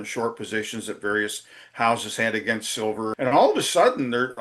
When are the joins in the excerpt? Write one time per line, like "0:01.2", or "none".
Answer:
0:03.1